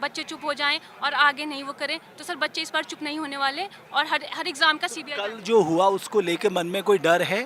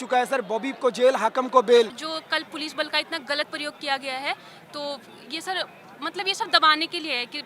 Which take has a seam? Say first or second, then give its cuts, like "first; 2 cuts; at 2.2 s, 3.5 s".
second; 1 cut; at 2.0 s